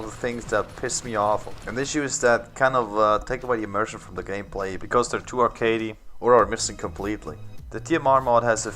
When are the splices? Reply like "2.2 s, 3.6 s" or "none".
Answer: 4.6 s